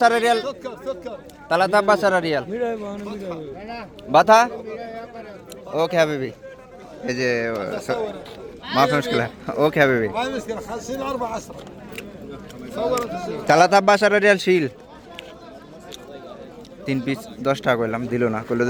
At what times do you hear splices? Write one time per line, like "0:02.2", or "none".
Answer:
none